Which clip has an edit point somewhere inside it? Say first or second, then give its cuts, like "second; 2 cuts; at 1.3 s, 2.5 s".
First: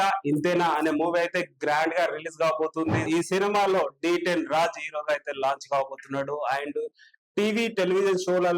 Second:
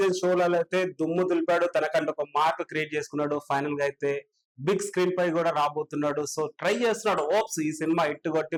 first; 1 cut; at 3.1 s